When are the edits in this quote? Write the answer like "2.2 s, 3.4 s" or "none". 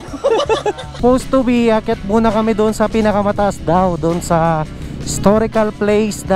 1.0 s